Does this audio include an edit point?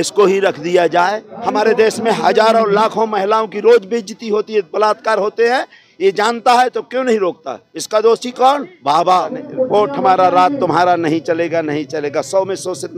yes; 2 cuts; at 1.3 s, 9.4 s

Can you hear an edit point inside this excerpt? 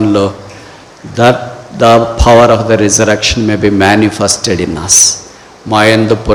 no; 0 cuts

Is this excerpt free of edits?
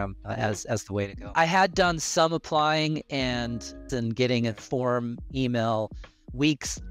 no; 2 cuts; at 1.3 s, 3.8 s

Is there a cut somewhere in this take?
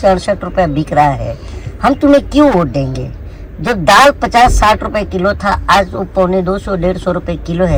no; 0 cuts

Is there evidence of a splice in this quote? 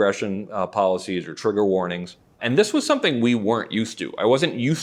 no; 0 cuts

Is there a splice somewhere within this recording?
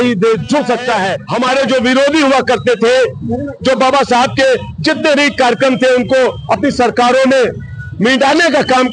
yes; 1 cut; at 1.2 s

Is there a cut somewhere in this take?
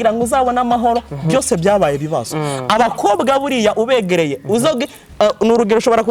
no; 0 cuts

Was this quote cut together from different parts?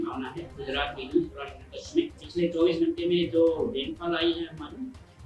yes; 1 cut; at 2.2 s

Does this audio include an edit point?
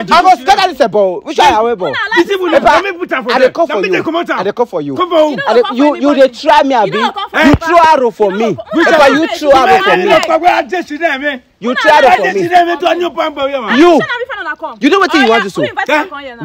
no; 0 cuts

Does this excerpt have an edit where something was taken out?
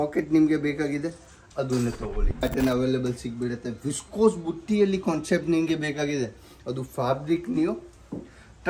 yes; 1 cut; at 2.4 s

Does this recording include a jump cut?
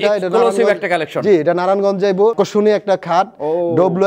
yes; 1 cut; at 2.3 s

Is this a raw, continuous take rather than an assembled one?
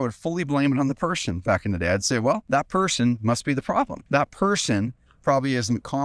no; 2 cuts; at 2.4 s, 4.0 s

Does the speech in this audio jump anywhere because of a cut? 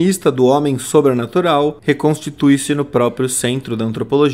no; 0 cuts

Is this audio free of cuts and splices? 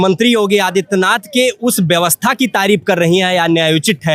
yes; 0 cuts

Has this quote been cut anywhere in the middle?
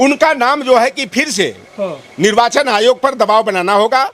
no; 0 cuts

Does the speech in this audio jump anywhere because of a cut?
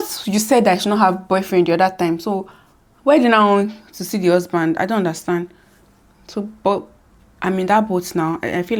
no; 0 cuts

